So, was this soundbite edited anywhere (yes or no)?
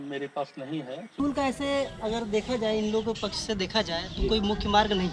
yes